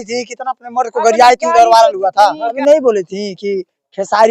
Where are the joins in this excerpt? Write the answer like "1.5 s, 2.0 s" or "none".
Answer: 2.6 s